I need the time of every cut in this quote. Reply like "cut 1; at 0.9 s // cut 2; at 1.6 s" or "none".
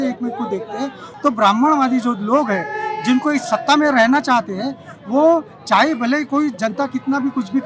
cut 1; at 1.0 s